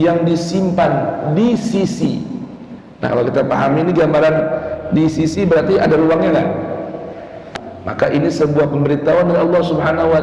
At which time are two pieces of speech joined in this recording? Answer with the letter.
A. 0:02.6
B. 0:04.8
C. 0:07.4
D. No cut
C